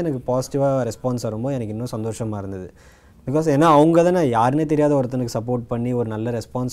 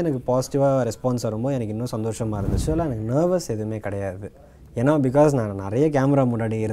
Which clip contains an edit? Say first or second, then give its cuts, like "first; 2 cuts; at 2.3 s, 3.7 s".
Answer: second; 1 cut; at 2.6 s